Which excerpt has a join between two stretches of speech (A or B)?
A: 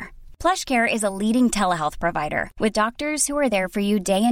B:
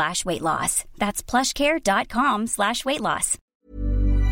B